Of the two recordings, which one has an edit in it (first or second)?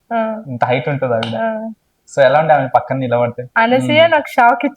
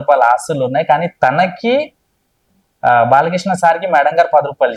first